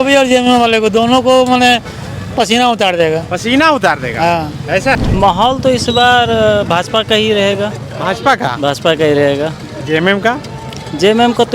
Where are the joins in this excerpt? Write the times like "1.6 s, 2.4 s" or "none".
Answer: 5.0 s